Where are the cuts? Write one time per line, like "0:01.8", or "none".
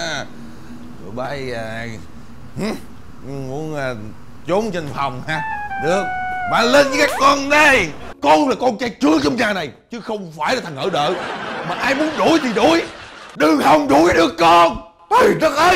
0:08.1